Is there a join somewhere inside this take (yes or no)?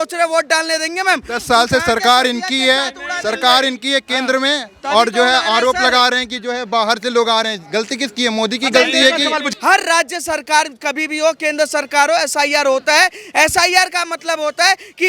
yes